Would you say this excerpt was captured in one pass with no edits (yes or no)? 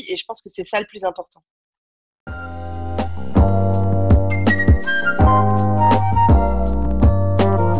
no